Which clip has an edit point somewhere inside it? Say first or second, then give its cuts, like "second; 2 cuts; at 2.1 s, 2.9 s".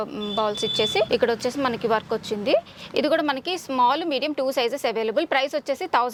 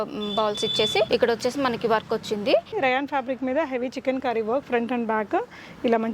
second; 1 cut; at 2.7 s